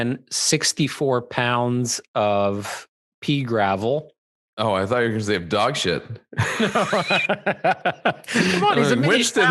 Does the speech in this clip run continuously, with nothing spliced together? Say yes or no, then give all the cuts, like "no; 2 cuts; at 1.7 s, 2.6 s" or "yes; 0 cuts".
yes; 0 cuts